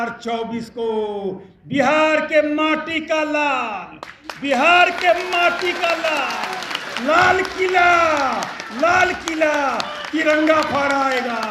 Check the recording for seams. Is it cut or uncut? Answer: uncut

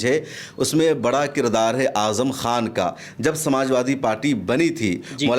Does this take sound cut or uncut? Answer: uncut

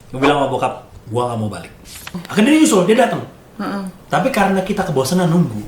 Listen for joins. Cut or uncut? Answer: cut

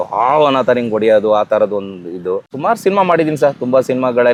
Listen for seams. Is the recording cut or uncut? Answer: uncut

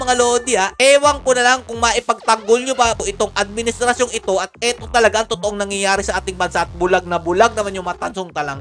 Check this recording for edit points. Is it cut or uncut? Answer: uncut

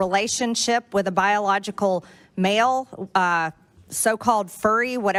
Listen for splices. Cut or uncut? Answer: uncut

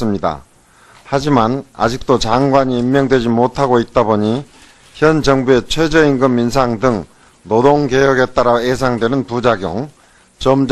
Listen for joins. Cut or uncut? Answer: cut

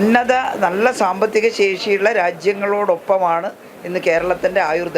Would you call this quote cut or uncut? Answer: uncut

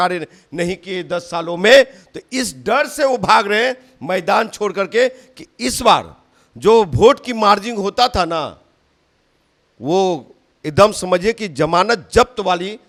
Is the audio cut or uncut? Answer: uncut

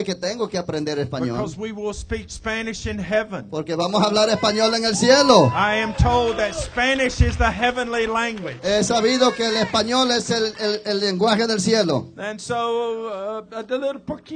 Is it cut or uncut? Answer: uncut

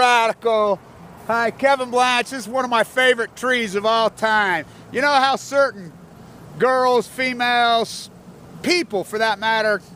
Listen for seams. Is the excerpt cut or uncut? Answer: uncut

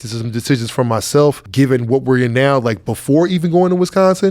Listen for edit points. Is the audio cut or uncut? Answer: cut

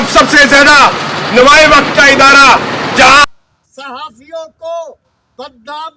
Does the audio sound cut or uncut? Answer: cut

